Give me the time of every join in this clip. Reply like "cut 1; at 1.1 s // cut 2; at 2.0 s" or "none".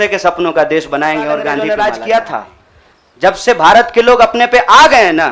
cut 1; at 1.6 s